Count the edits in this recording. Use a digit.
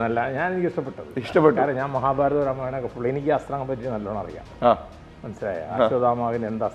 0